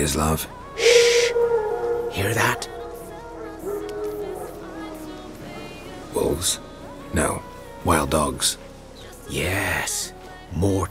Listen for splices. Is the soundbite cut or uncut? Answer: uncut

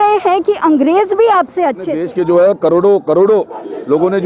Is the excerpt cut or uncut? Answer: cut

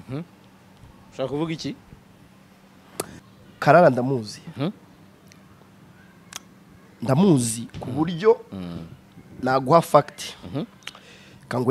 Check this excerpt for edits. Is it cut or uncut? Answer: cut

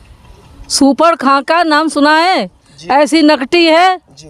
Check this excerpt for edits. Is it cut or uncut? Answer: uncut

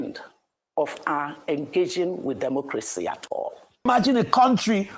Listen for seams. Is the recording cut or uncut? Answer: cut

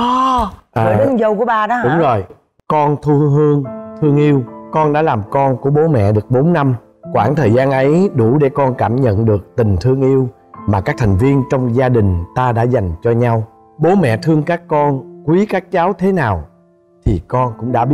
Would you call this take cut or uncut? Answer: cut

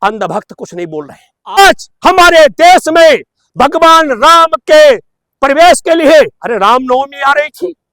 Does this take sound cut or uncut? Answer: cut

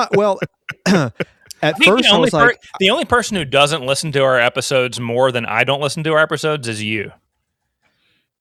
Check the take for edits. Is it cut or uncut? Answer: uncut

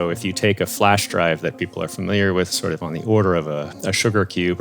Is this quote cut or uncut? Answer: cut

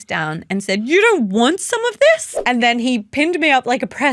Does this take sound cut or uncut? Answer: cut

